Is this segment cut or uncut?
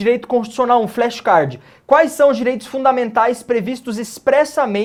uncut